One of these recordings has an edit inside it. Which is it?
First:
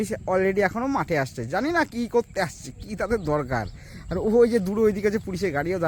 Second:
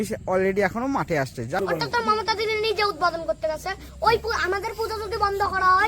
second; 1 cut; at 1.6 s

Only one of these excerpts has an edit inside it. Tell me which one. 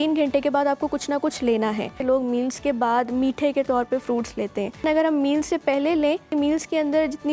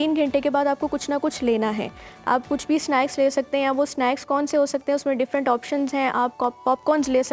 first; 3 cuts; at 2.0 s, 4.8 s, 6.3 s

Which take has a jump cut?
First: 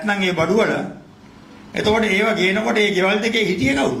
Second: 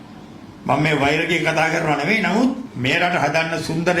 second; 1 cut; at 2.7 s

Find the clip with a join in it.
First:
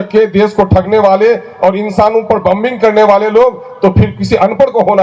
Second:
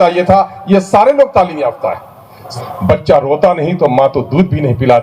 second; 1 cut; at 2.5 s

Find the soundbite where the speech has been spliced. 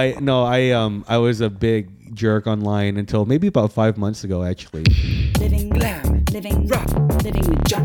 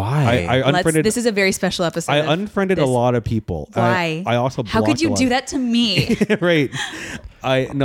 first; 1 cut; at 4.8 s

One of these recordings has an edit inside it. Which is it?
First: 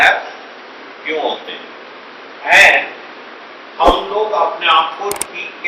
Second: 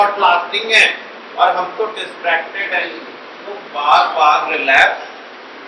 second; 1 cut; at 3.6 s

